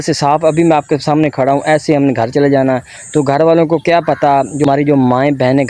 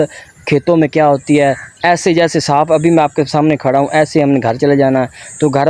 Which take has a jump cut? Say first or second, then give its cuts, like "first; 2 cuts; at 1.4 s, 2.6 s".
first; 1 cut; at 4.7 s